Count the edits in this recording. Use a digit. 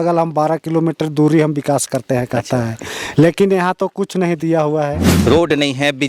1